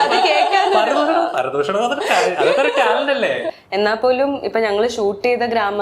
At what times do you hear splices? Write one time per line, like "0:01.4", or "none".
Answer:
0:03.5